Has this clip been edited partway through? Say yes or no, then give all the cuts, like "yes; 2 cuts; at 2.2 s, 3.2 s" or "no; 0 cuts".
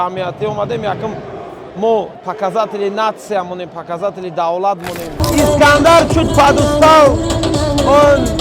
yes; 2 cuts; at 2.3 s, 5.2 s